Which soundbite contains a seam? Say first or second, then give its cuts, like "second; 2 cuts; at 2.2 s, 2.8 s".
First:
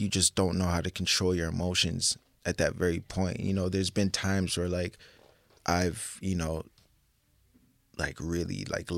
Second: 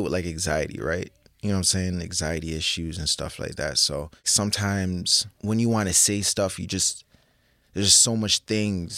second; 2 cuts; at 4.3 s, 5.2 s